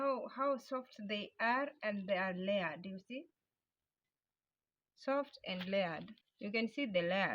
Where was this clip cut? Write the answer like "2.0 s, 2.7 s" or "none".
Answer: 6.1 s